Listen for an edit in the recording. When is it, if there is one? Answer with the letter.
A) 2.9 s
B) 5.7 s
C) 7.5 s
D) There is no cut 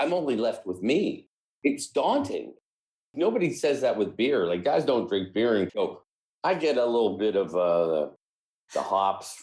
B